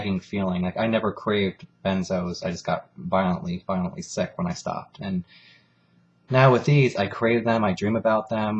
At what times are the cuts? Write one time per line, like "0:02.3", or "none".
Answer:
0:01.2